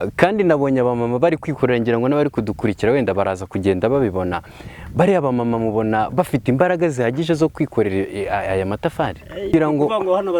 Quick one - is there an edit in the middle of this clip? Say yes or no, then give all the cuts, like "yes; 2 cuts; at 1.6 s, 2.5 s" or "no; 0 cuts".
yes; 1 cut; at 9.5 s